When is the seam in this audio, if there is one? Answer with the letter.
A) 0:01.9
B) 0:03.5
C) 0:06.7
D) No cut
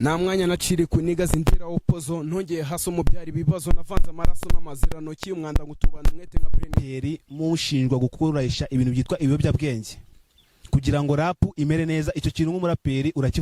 C